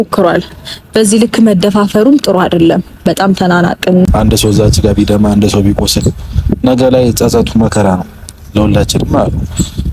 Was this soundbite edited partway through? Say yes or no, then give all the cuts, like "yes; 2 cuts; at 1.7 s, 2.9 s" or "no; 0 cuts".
yes; 1 cut; at 4.1 s